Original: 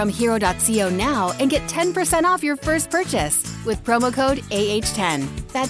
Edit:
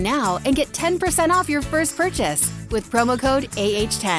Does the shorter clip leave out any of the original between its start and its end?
no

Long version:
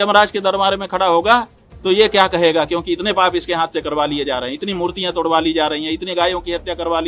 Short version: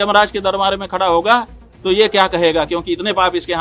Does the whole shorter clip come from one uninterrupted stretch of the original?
yes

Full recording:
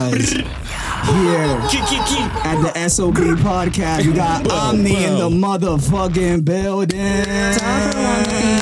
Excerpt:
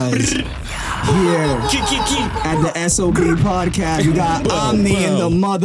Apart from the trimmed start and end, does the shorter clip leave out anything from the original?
no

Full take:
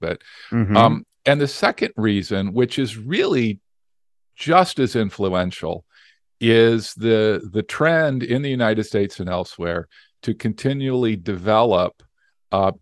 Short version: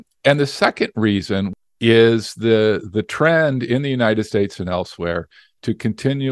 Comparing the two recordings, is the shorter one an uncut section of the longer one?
no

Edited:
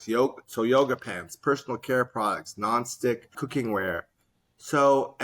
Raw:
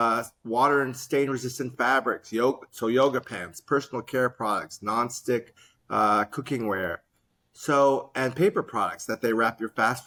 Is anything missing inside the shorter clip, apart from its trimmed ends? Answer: yes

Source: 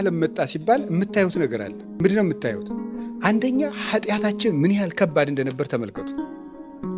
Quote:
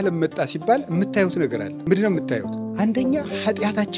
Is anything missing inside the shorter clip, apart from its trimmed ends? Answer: yes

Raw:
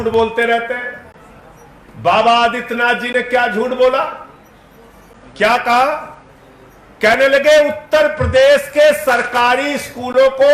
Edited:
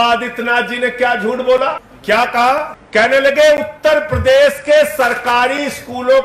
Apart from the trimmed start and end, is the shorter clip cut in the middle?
yes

